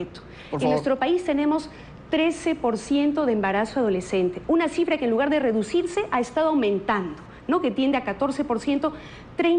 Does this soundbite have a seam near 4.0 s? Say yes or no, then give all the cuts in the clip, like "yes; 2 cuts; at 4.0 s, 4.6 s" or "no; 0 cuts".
yes; 1 cut; at 4.0 s